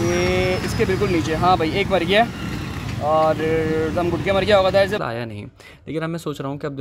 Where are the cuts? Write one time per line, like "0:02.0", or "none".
0:05.0

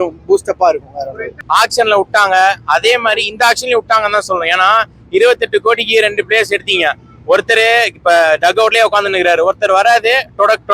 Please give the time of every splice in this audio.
0:01.3

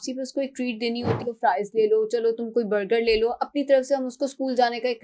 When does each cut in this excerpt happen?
0:01.2

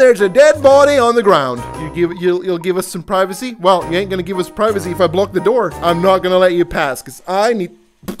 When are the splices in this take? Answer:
0:01.7
0:05.8

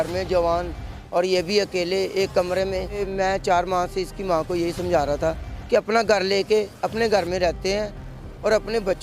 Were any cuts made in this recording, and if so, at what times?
0:03.0

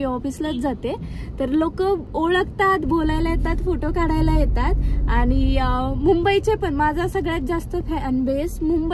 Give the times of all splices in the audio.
none

